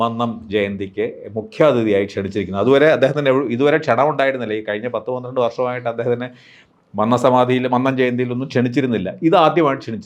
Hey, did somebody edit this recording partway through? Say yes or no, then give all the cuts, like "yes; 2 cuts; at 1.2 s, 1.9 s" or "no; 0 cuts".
no; 0 cuts